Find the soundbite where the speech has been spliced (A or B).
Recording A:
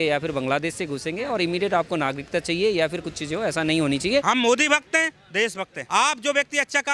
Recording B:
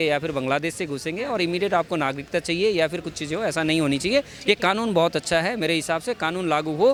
A